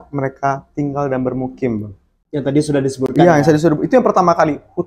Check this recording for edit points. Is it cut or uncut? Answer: uncut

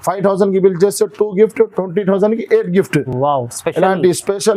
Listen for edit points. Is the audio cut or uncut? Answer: uncut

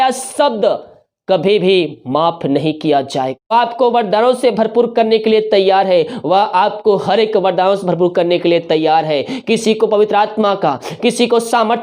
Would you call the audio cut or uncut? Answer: cut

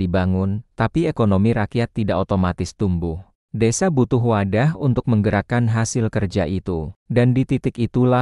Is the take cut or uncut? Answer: cut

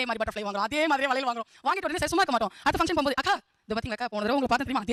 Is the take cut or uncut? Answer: uncut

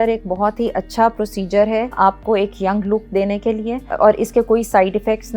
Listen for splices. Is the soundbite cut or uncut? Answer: cut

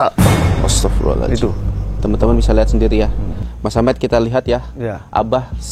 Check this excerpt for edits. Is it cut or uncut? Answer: uncut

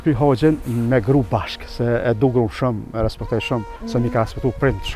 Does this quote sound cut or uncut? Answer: uncut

